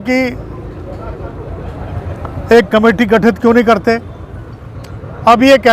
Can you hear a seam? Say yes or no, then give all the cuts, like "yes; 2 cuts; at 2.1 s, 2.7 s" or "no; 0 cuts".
no; 0 cuts